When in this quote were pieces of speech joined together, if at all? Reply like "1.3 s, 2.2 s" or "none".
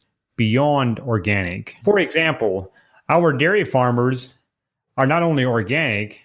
1.7 s